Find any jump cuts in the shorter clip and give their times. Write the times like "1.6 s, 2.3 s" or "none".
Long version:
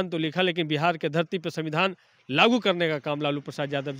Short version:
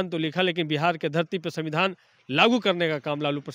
none

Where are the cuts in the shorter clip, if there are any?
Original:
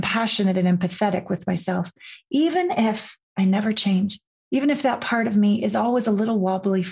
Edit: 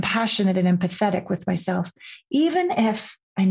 none

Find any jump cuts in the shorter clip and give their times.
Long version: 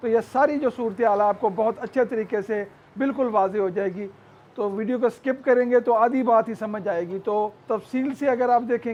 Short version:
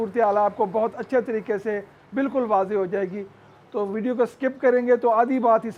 none

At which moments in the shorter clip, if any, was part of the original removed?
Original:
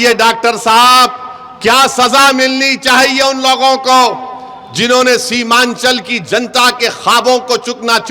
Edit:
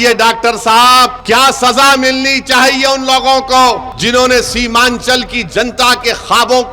1.2 s, 3.9 s

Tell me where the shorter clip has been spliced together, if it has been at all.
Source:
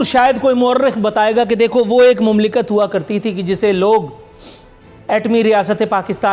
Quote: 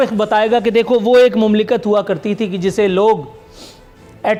none

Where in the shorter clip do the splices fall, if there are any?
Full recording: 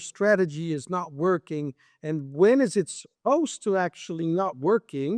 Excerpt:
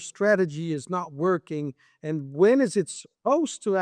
none

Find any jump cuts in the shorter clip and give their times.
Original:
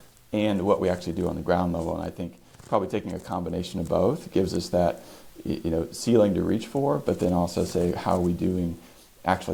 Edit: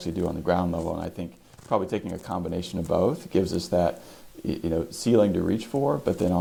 none

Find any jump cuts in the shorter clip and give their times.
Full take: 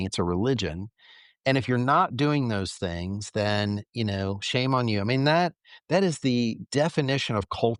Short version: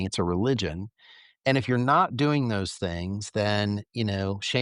none

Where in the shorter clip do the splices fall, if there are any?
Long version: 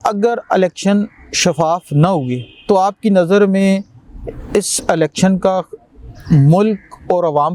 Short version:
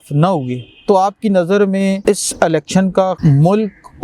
2.0 s, 3.2 s

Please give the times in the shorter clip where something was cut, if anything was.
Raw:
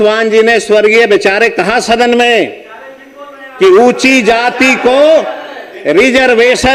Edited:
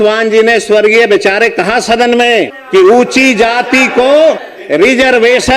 2.6 s, 4.5 s

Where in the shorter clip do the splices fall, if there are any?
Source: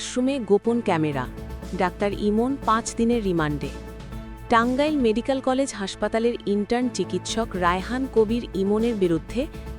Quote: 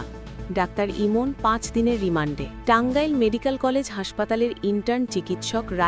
2.5 s

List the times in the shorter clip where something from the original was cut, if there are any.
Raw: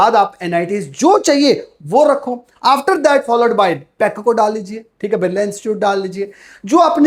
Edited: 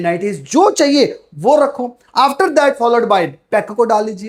none

